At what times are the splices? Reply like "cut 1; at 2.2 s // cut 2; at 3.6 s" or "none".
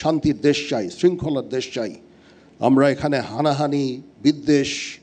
none